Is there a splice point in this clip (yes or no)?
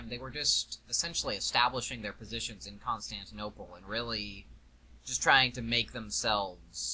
yes